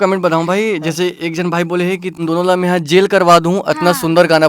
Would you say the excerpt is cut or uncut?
cut